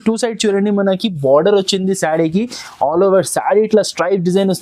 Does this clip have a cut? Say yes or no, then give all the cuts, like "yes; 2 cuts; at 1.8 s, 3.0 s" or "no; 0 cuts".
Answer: no; 0 cuts